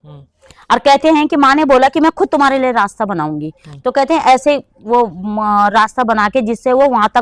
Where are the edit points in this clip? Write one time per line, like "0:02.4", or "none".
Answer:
none